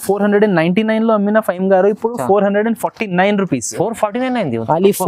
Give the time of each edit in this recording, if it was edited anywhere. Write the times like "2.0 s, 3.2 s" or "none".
none